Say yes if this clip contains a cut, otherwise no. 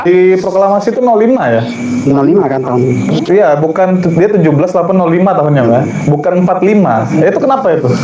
no